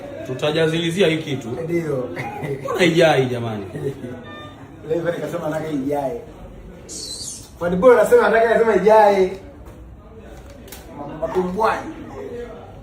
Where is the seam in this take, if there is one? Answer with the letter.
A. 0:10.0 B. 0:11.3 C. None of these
B